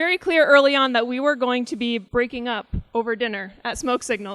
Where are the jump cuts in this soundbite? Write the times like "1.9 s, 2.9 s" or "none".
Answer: 2.1 s